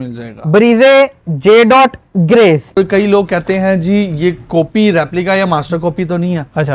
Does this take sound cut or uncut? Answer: cut